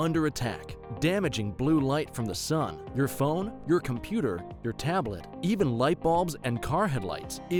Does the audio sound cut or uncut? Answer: uncut